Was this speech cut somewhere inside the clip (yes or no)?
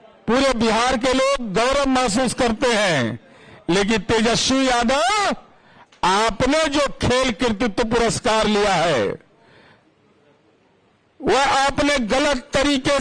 no